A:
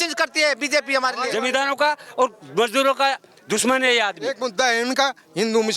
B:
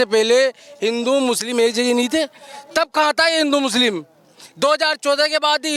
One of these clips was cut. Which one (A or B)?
A